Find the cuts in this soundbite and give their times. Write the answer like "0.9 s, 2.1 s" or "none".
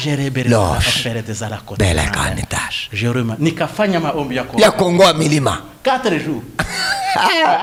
none